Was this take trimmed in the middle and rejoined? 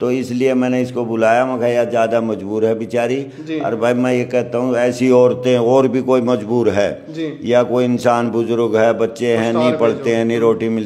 no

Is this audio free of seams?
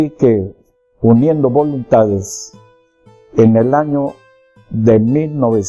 yes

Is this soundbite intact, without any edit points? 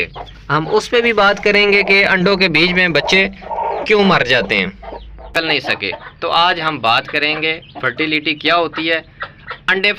no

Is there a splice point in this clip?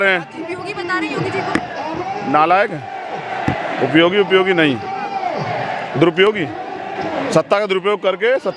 no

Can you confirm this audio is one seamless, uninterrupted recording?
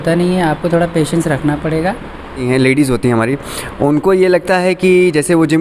no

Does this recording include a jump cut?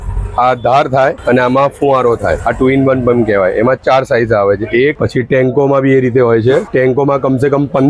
yes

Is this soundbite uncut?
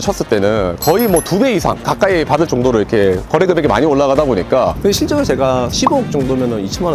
no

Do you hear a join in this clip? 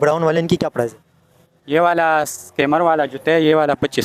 no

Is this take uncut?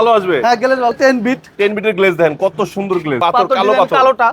no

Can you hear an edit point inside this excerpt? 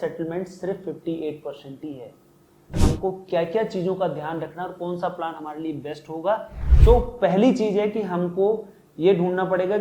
yes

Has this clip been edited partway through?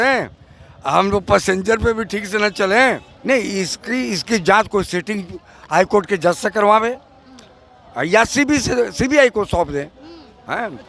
yes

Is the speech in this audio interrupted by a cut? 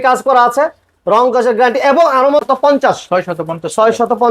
yes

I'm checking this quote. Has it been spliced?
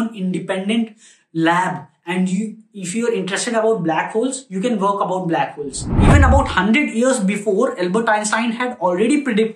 yes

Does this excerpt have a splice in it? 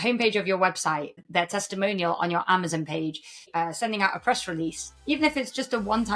yes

